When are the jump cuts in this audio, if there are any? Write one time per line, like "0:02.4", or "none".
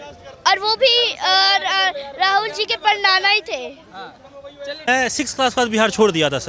0:04.9